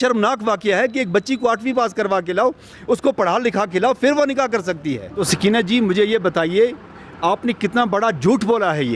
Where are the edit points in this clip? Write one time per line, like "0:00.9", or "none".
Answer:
0:05.2